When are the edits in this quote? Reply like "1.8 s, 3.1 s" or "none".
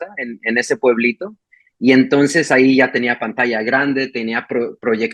none

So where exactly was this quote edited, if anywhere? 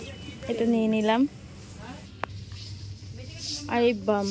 2.0 s

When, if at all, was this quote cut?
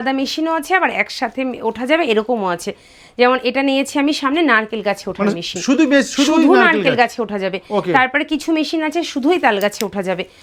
none

